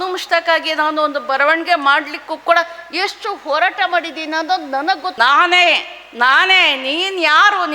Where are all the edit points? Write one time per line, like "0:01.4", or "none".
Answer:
0:05.1

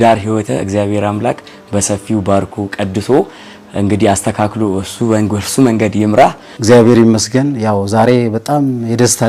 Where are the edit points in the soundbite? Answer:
0:06.5

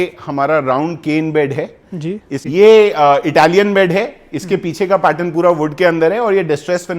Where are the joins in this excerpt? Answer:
0:02.3

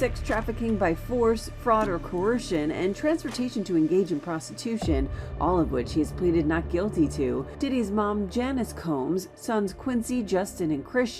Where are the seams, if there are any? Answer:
none

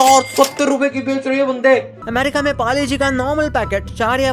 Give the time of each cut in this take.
0:02.0

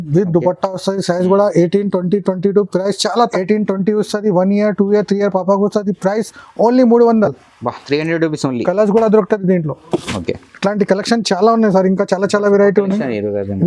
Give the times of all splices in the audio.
0:03.4

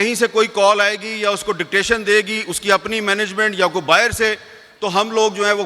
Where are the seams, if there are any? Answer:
none

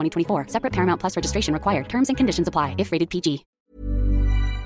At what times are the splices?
0:03.5

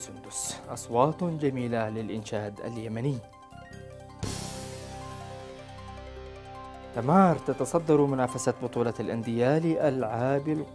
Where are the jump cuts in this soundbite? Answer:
none

